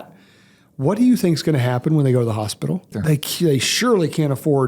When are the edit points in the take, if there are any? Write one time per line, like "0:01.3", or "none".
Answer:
0:03.0